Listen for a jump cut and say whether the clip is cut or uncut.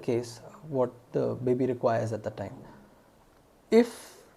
uncut